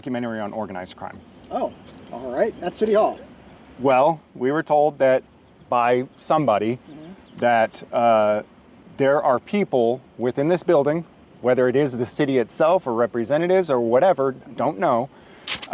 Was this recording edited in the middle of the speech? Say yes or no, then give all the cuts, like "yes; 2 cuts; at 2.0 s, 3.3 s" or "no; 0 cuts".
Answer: no; 0 cuts